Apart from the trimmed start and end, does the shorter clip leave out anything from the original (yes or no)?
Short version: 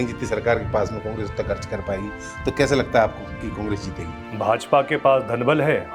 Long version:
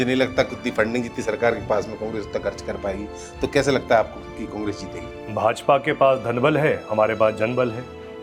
no